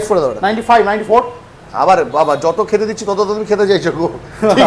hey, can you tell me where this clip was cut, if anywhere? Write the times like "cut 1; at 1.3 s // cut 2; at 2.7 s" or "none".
none